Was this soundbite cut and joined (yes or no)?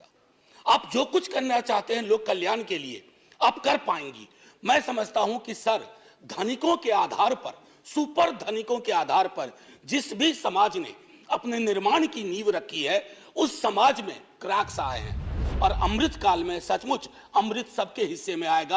yes